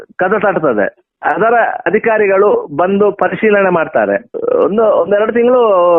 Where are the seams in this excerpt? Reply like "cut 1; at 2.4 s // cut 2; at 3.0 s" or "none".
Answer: cut 1; at 4.3 s